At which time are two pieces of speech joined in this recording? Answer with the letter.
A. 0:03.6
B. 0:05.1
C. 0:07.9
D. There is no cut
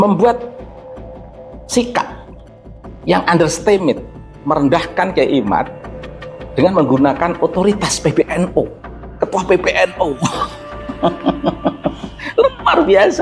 D